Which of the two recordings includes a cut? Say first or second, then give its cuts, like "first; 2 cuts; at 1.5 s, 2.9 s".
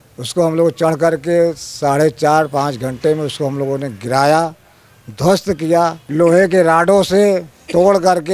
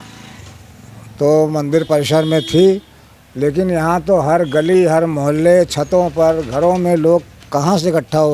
first; 1 cut; at 6.0 s